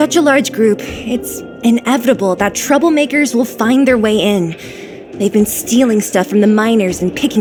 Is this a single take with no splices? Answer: yes; 0 cuts

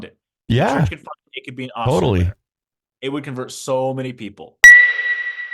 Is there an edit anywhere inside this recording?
yes; 1 cut; at 4.5 s

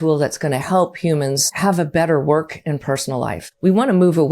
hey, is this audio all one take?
no; 2 cuts; at 1.5 s, 3.4 s

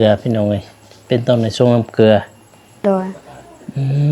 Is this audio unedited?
no; 1 cut; at 2.8 s

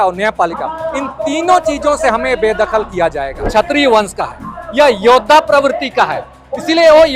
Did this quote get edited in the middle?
yes; 1 cut; at 3.5 s

